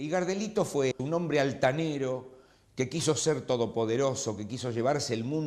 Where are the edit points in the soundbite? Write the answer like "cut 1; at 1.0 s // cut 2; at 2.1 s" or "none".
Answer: cut 1; at 1.0 s